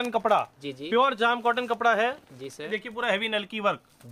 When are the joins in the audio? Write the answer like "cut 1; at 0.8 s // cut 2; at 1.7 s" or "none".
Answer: cut 1; at 2.7 s